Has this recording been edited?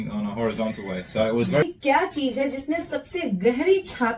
yes; 1 cut; at 1.6 s

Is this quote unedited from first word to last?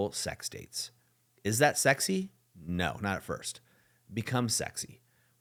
yes; 0 cuts

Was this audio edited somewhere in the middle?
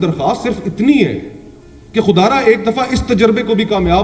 no; 0 cuts

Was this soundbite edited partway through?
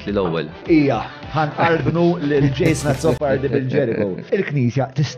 yes; 2 cuts; at 1.2 s, 4.3 s

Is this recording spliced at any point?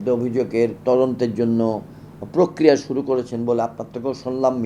no; 0 cuts

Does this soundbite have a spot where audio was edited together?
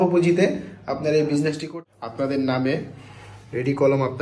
yes; 1 cut; at 1.6 s

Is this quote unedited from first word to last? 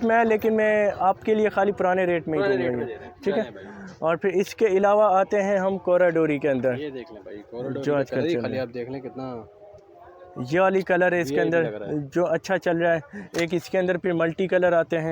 yes; 0 cuts

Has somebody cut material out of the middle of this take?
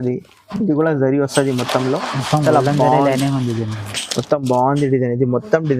no; 0 cuts

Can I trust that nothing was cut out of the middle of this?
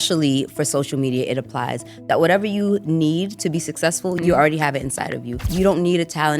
no; 2 cuts; at 4.2 s, 5.4 s

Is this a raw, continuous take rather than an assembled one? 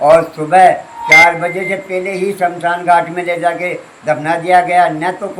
yes; 0 cuts

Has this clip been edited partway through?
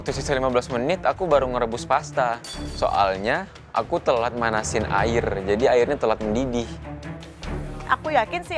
no; 0 cuts

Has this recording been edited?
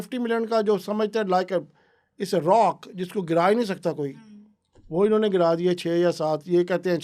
no; 0 cuts

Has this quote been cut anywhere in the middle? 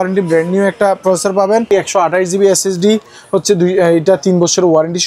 yes; 1 cut; at 1.7 s

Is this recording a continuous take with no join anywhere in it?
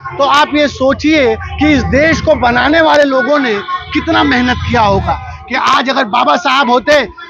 no; 1 cut; at 5.3 s

